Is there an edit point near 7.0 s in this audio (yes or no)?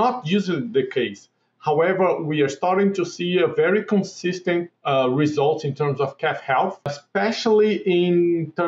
yes